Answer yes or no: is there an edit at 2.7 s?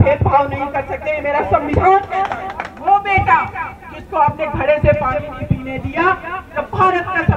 yes